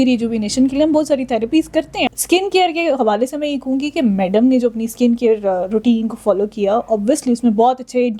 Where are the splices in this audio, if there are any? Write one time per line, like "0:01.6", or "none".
0:02.1